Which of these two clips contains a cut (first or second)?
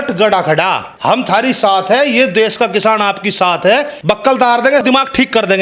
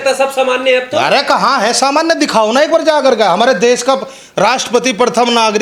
first